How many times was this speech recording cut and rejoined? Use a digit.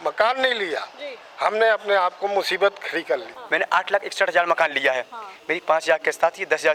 1